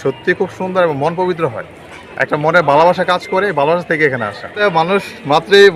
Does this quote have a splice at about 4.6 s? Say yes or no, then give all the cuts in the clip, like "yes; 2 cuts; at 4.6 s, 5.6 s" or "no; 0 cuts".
yes; 1 cut; at 4.6 s